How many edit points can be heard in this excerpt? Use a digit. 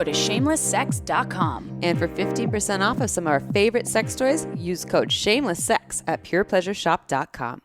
0